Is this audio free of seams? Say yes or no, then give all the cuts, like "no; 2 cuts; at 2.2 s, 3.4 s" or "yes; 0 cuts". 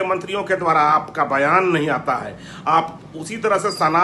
yes; 0 cuts